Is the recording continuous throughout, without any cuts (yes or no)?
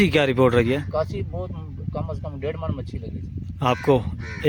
yes